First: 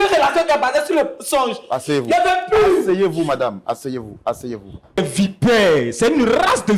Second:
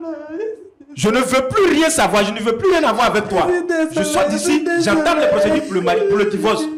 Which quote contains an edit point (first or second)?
first